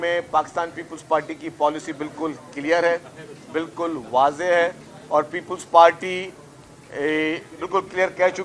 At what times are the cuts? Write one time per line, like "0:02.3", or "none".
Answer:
none